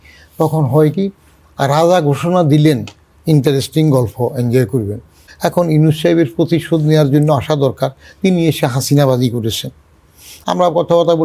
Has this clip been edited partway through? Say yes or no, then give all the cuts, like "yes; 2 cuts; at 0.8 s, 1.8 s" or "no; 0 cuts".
yes; 2 cuts; at 5.2 s, 10.3 s